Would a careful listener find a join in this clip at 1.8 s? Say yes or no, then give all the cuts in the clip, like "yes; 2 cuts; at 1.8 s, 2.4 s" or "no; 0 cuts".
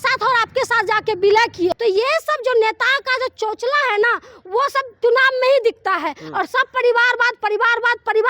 yes; 1 cut; at 1.8 s